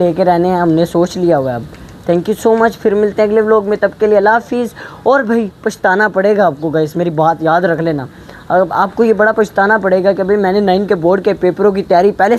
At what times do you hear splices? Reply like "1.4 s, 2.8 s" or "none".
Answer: none